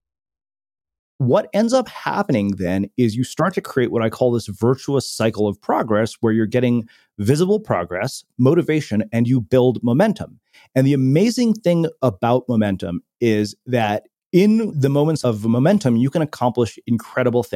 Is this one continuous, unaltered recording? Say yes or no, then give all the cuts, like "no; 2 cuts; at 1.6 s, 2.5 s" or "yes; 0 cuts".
no; 2 cuts; at 1.1 s, 15.2 s